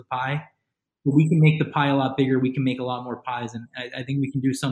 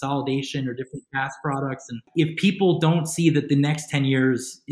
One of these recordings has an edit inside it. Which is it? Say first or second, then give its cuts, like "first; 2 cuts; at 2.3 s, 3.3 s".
second; 1 cut; at 2.0 s